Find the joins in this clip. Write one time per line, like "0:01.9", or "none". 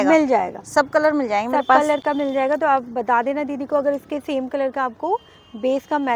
none